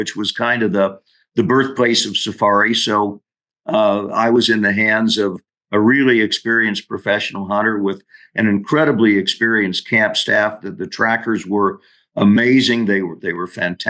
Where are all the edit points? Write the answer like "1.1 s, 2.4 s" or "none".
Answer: none